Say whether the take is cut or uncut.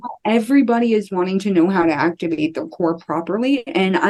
uncut